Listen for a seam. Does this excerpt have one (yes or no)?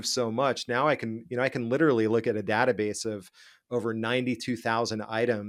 no